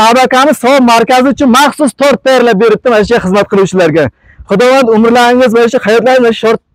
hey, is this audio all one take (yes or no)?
yes